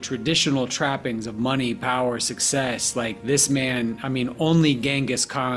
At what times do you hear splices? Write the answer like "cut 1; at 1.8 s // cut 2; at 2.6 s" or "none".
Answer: none